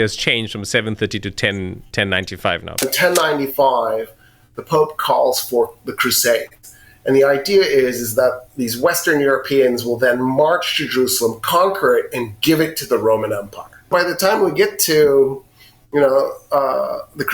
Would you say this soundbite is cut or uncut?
cut